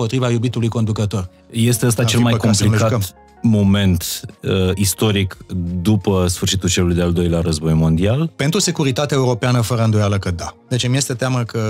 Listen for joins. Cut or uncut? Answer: cut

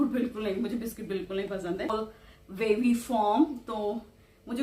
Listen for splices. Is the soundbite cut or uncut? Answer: cut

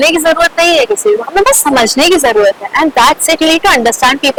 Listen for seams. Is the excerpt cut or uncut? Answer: uncut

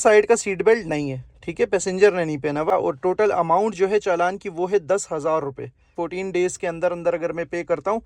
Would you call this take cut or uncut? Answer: cut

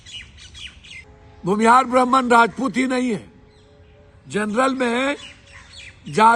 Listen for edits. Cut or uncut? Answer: cut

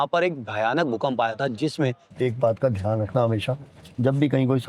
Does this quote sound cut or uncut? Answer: cut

